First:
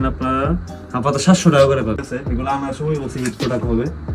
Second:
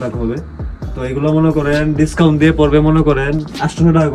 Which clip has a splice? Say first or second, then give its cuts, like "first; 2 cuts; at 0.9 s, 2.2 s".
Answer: first; 1 cut; at 2.1 s